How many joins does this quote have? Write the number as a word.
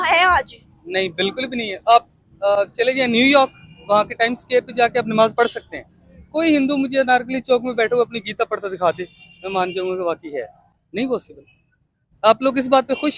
zero